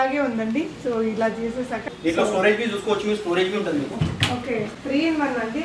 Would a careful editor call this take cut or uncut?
cut